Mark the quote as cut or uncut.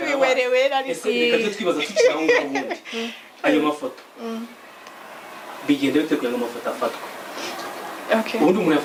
uncut